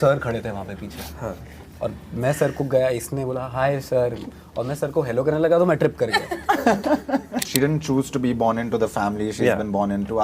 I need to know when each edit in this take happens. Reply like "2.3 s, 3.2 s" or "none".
7.5 s